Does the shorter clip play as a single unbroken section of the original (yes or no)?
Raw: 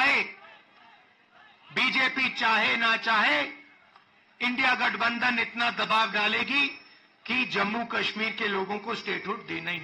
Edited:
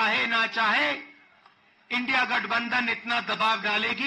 yes